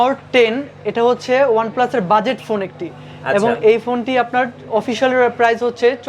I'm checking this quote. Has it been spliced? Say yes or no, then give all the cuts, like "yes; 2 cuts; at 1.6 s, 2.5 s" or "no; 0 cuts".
no; 0 cuts